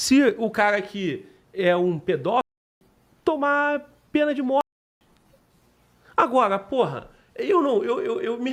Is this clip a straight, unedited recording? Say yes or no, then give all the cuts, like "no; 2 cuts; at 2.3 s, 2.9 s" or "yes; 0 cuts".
yes; 0 cuts